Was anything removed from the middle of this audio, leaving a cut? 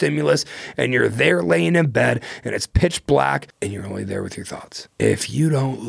yes; 2 cuts; at 3.5 s, 4.8 s

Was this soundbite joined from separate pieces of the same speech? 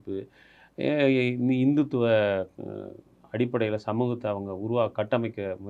no; 0 cuts

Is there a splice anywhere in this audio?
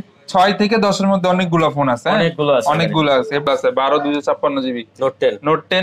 yes; 1 cut; at 3.5 s

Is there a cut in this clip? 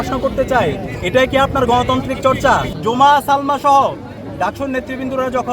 yes; 1 cut; at 2.7 s

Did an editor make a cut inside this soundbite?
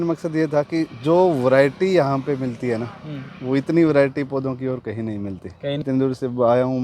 yes; 1 cut; at 5.8 s

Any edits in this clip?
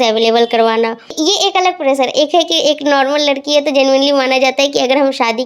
yes; 1 cut; at 1.1 s

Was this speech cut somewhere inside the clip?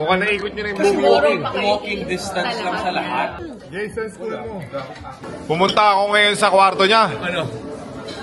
yes; 2 cuts; at 3.4 s, 5.3 s

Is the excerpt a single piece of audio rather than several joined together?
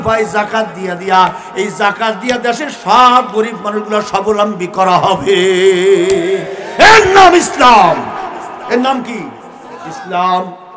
yes; 0 cuts

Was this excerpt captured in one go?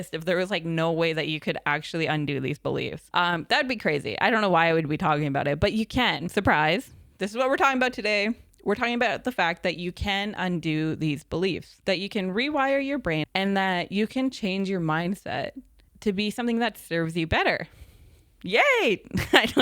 no; 4 cuts; at 3.0 s, 6.2 s, 11.7 s, 13.2 s

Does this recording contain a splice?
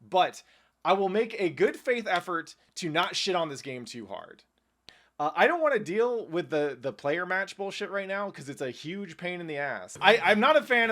yes; 2 cuts; at 4.8 s, 9.9 s

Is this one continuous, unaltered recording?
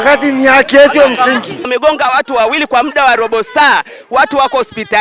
no; 1 cut; at 1.7 s

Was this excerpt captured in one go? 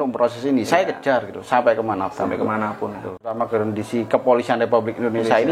no; 1 cut; at 3.2 s

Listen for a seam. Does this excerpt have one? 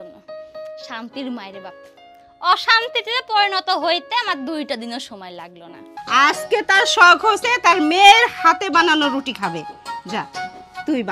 yes; 1 cut; at 5.9 s

